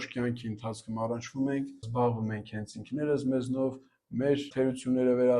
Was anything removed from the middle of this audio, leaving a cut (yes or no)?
yes